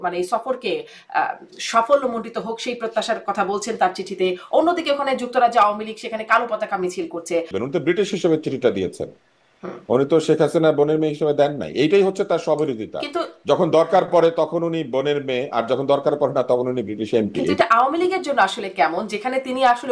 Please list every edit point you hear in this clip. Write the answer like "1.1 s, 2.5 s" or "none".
7.5 s, 17.5 s